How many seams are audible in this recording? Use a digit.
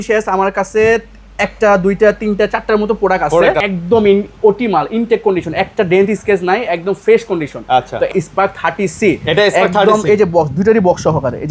2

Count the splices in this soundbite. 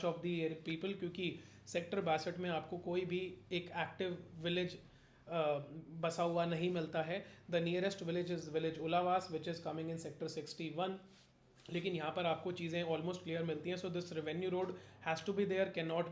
0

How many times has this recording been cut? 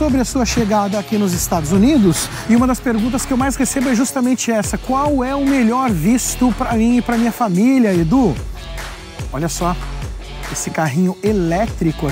1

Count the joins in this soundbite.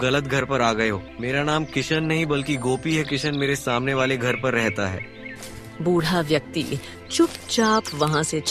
1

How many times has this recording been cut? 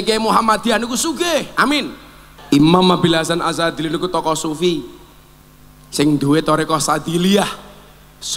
1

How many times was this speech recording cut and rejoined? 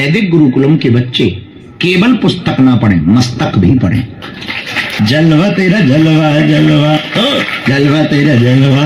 1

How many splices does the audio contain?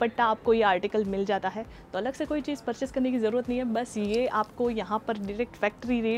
0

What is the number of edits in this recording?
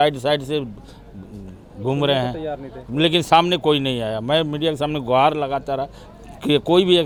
0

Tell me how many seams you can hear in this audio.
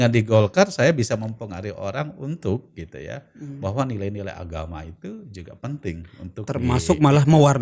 0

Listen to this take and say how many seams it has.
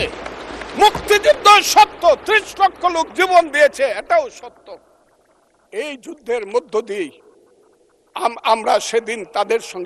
0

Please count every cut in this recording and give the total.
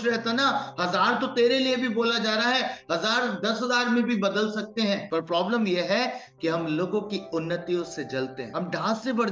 2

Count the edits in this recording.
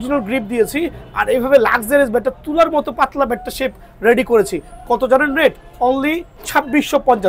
1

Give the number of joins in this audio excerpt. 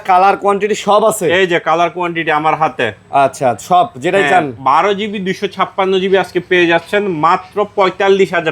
0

